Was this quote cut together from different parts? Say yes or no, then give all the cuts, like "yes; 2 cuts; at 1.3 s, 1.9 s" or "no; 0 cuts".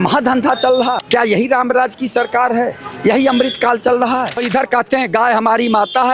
yes; 2 cuts; at 1.0 s, 4.5 s